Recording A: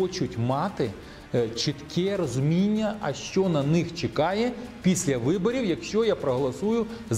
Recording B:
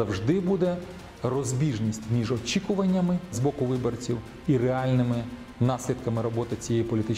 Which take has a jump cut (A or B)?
B